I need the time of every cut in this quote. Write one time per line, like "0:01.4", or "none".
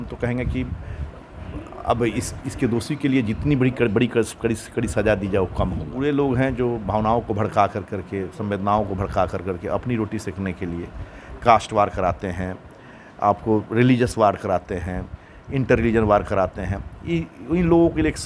0:05.9